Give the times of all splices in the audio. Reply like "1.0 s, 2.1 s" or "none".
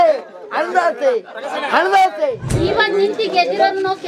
2.6 s